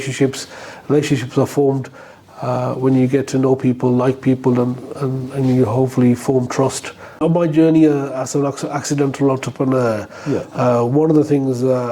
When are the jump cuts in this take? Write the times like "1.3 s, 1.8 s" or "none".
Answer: 7.2 s